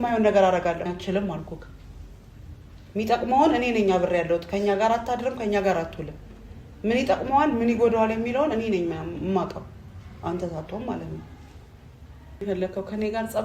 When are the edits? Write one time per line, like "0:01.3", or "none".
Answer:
0:00.9
0:12.4